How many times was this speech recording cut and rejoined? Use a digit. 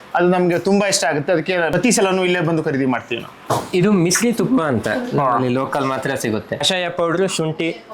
1